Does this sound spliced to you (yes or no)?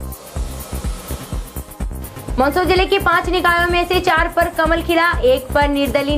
no